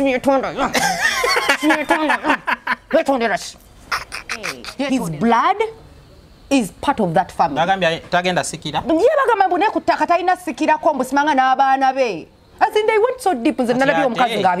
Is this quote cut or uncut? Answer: cut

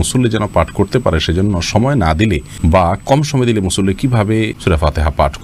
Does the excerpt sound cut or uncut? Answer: cut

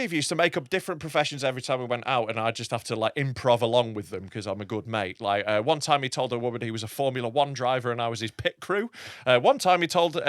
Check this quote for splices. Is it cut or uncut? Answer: uncut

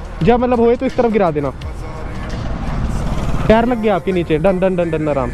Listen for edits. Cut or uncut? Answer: uncut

